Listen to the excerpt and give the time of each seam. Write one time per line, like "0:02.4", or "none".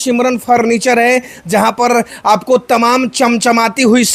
none